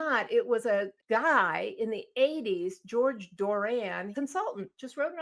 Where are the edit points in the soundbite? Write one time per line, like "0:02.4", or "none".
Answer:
0:00.9
0:04.1